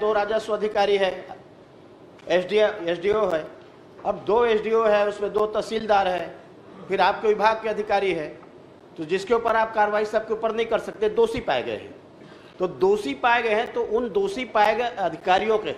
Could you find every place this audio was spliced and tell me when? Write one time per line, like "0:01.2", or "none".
none